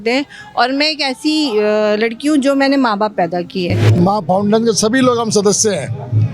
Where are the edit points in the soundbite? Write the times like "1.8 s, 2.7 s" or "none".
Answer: 3.8 s